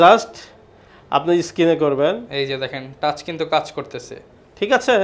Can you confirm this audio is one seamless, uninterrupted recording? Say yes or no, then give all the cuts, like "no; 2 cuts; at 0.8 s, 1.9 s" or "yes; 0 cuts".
yes; 0 cuts